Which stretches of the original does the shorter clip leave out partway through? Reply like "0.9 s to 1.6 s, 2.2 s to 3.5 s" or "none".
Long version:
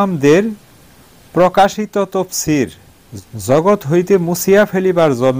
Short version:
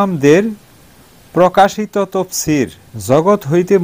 2.9 s to 3.3 s